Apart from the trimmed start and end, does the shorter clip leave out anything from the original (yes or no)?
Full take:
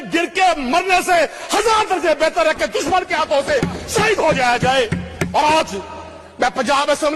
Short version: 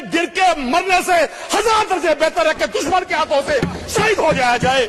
no